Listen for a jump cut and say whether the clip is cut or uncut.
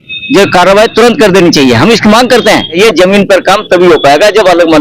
cut